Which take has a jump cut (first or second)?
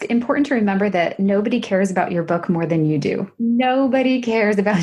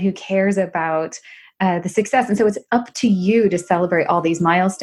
first